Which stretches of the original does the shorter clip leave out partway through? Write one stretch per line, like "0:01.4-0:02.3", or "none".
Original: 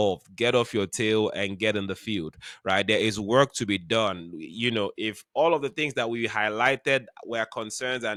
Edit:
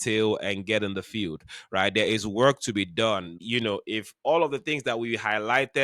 0:04.3-0:04.5